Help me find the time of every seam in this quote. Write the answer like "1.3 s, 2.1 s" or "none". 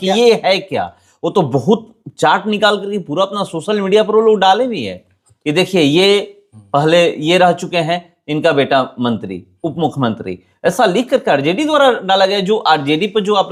none